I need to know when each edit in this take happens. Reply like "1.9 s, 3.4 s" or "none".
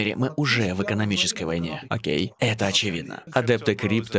3.2 s